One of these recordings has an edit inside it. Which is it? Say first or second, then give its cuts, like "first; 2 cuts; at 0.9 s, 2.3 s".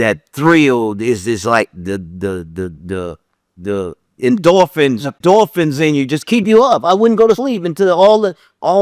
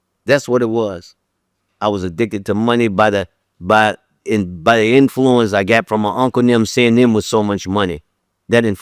first; 1 cut; at 5.2 s